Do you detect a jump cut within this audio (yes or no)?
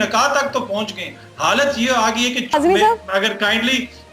yes